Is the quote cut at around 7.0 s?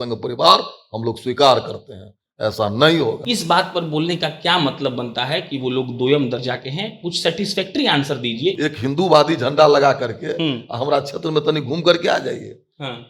no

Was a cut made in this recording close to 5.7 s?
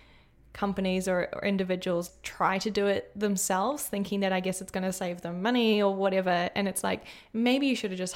no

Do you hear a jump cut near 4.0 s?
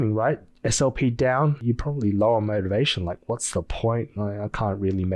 no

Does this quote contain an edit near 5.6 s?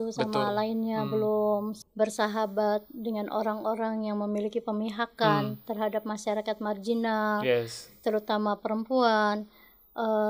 no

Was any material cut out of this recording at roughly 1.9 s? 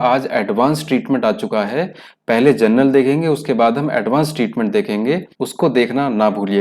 no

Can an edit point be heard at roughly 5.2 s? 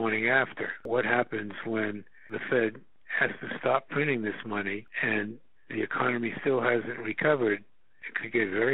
yes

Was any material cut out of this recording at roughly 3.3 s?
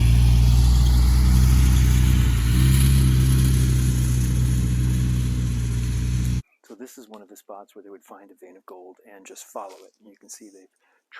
no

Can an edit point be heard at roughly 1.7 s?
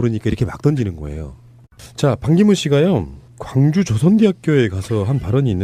no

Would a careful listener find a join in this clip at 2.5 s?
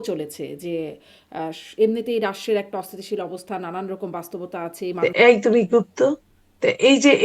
no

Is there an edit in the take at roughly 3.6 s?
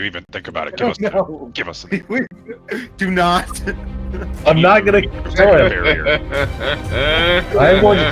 no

